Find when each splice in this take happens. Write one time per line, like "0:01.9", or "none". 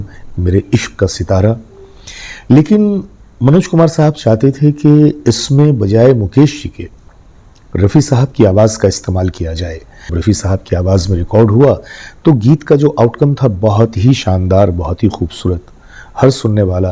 0:10.2